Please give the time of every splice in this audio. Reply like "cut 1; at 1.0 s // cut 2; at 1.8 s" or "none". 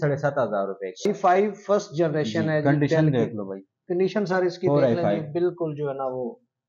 cut 1; at 1.0 s